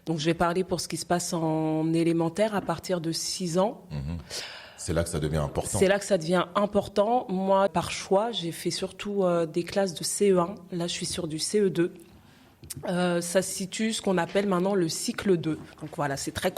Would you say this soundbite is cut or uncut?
cut